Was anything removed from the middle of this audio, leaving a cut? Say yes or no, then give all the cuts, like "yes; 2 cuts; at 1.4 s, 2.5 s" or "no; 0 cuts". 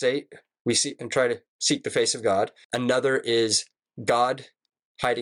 yes; 1 cut; at 2.6 s